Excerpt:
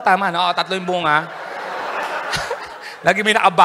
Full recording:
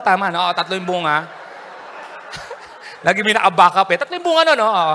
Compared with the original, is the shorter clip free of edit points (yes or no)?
yes